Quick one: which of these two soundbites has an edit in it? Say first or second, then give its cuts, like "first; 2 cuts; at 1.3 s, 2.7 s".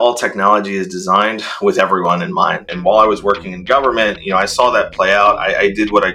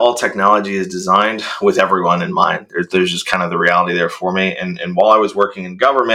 first; 1 cut; at 2.3 s